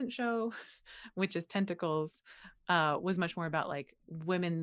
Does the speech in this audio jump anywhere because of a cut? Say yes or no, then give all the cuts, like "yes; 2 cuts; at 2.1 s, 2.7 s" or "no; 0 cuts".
no; 0 cuts